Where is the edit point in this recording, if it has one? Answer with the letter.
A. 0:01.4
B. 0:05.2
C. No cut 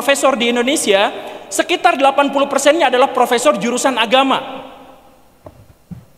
C